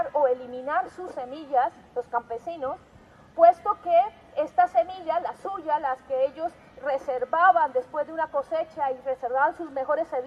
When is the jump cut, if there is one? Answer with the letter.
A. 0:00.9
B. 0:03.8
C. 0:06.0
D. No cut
B